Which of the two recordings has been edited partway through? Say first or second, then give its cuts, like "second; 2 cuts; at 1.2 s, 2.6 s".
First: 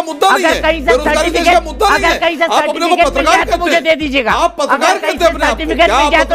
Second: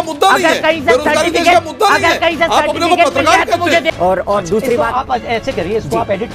second; 1 cut; at 3.9 s